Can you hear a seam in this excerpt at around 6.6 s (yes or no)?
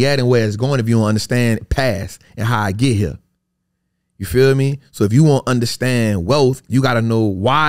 no